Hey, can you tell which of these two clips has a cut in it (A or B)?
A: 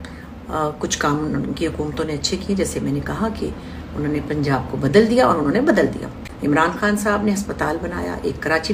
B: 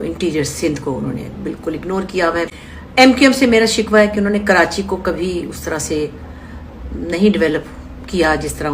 B